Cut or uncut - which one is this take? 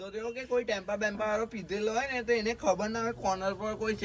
uncut